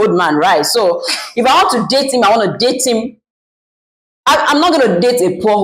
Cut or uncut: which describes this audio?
uncut